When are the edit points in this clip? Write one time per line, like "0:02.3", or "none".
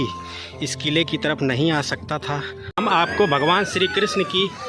0:02.8